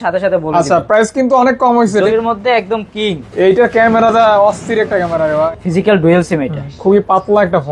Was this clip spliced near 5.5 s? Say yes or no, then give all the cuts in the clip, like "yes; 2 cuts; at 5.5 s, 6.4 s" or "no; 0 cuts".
yes; 2 cuts; at 2.1 s, 5.5 s